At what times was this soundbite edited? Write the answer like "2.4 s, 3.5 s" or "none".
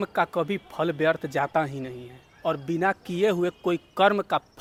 none

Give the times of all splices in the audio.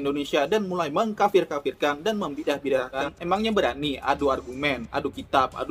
3.0 s

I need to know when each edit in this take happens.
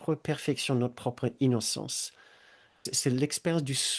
2.9 s

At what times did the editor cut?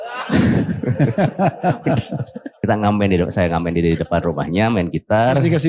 2.6 s

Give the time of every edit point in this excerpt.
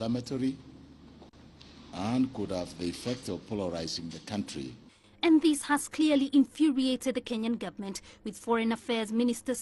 8.3 s

